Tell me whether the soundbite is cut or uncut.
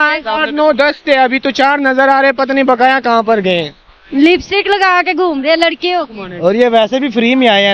uncut